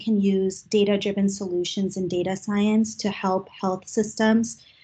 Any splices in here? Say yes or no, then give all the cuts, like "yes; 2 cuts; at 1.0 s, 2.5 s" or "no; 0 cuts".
no; 0 cuts